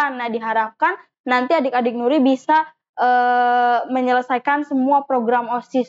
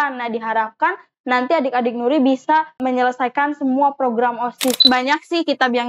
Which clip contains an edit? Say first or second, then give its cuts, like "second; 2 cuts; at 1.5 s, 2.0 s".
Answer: second; 2 cuts; at 2.8 s, 4.8 s